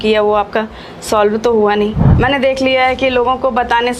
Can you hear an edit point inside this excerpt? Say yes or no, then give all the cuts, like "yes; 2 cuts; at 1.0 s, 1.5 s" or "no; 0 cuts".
yes; 1 cut; at 2.0 s